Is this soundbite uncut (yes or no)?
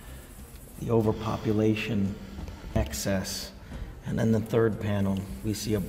no